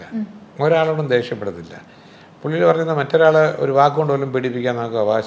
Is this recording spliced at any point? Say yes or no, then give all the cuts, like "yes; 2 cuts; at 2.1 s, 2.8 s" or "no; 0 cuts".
no; 0 cuts